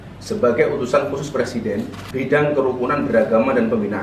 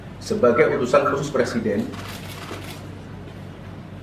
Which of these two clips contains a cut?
first; 1 cut; at 2.0 s

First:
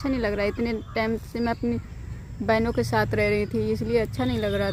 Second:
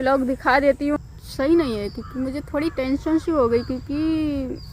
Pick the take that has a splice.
second; 1 cut; at 1.0 s

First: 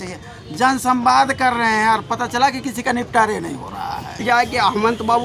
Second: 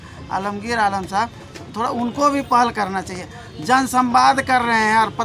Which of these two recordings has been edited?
first; 1 cut; at 4.2 s

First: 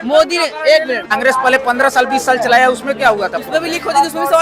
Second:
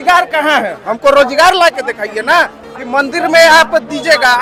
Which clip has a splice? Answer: first; 1 cut; at 1.1 s

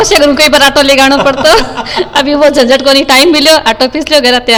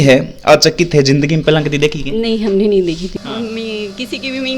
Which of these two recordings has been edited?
second; 1 cut; at 3.1 s

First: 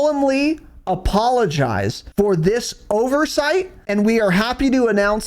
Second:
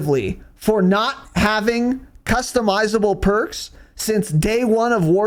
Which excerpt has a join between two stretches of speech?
first; 2 cuts; at 2.0 s, 3.8 s

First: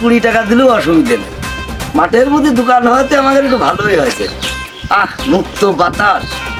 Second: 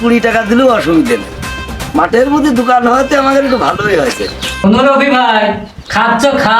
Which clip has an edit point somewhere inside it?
second; 1 cut; at 4.4 s

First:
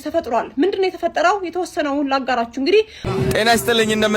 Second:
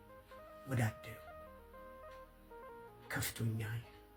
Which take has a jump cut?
first; 1 cut; at 3.1 s

